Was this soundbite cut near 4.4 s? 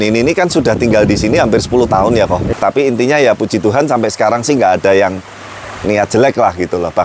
no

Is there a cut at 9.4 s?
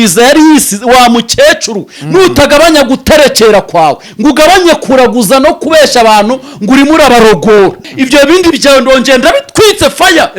no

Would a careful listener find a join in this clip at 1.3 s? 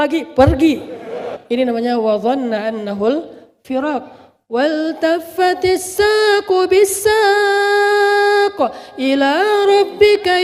yes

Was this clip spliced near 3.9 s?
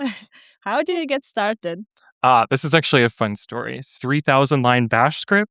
yes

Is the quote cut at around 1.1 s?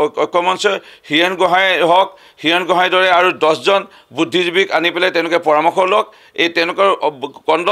no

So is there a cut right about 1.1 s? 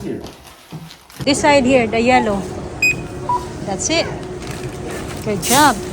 yes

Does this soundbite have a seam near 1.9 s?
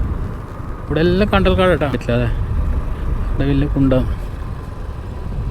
yes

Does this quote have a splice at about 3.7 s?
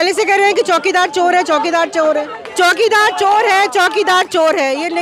no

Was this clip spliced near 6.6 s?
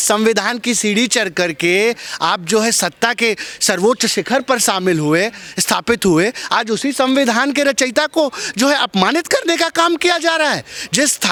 no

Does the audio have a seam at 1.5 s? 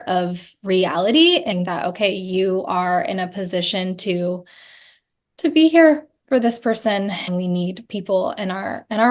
yes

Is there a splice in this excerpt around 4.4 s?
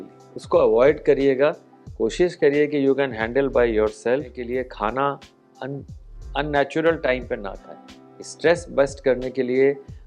yes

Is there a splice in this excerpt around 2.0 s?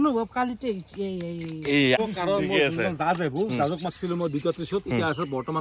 yes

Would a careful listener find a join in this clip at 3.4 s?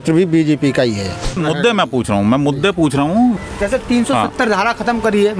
yes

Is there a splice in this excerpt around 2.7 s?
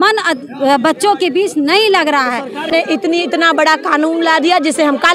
yes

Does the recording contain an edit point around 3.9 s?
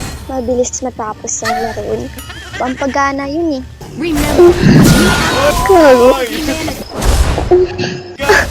yes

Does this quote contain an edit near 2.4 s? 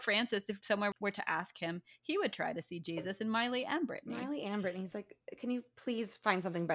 no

